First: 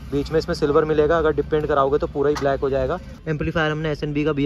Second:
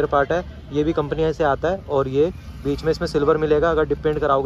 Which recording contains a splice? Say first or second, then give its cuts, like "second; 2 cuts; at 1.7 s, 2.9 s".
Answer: first; 1 cut; at 3.1 s